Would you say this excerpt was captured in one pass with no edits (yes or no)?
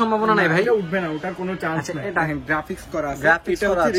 no